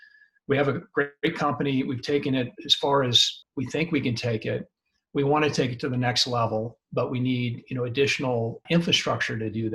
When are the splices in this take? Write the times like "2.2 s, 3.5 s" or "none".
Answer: 3.3 s, 8.6 s

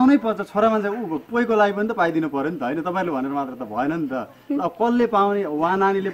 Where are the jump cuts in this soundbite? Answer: none

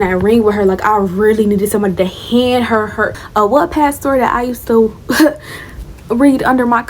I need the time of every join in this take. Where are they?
3.2 s

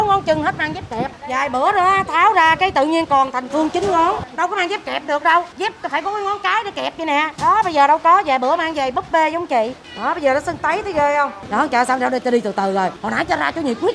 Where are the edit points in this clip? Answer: 1.2 s, 4.3 s, 5.5 s, 9.9 s, 11.4 s, 13.0 s

